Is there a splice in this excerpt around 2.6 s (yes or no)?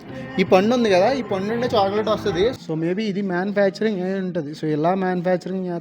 yes